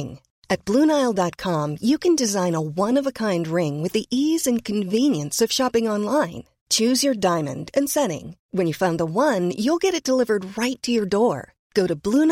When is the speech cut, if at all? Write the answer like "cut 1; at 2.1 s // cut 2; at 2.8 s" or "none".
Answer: none

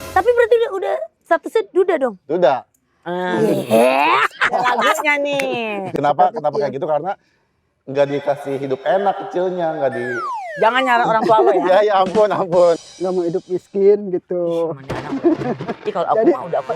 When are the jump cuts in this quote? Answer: cut 1; at 5.9 s // cut 2; at 12.8 s

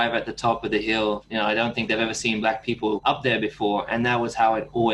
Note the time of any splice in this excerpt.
cut 1; at 1.2 s // cut 2; at 3.0 s

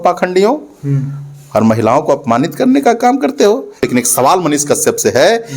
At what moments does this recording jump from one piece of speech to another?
cut 1; at 3.9 s

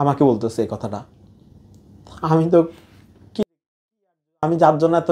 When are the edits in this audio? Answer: none

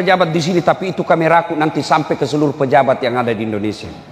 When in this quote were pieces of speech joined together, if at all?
none

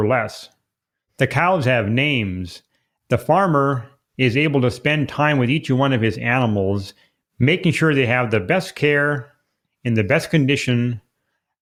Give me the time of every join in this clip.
none

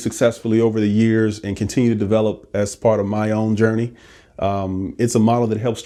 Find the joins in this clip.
none

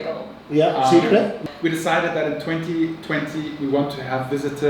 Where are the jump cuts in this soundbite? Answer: cut 1; at 1.4 s

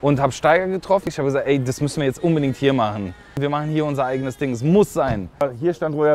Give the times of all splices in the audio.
cut 1; at 1.1 s // cut 2; at 3.3 s // cut 3; at 5.4 s

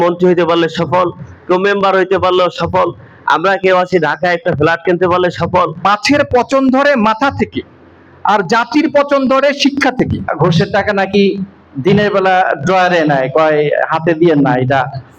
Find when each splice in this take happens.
cut 1; at 5.8 s // cut 2; at 10.3 s

